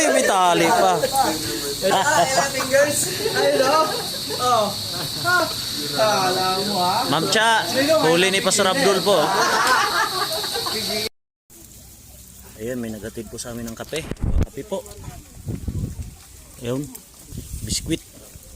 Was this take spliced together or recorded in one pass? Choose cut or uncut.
cut